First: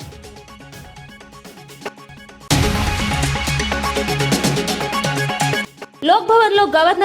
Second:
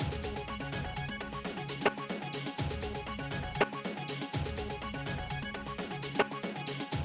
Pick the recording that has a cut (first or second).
first